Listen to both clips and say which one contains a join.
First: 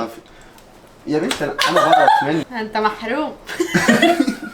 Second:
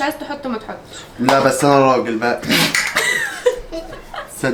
first; 1 cut; at 2.5 s

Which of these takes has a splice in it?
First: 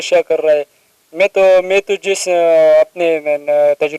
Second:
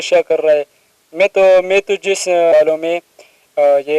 second; 1 cut; at 2.5 s

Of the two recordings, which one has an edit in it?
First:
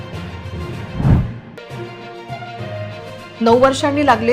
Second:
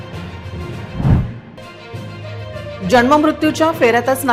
first; 2 cuts; at 1.6 s, 3.3 s

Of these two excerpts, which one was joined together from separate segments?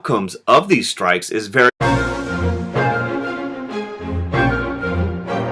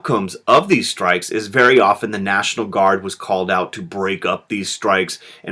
second; 1 cut; at 1.7 s

